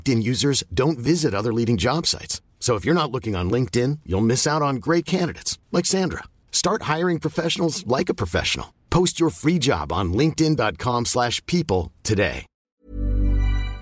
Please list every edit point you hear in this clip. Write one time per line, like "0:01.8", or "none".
0:12.8